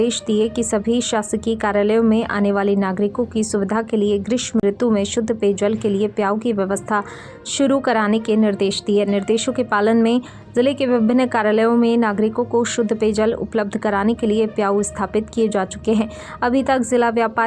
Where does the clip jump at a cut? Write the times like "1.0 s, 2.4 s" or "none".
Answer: none